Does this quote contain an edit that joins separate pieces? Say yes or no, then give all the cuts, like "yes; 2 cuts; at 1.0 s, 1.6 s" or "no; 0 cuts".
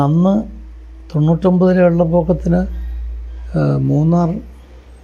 no; 0 cuts